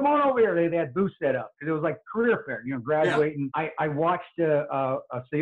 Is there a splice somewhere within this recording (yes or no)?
yes